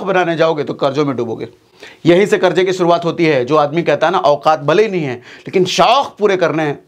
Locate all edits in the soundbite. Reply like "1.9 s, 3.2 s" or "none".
none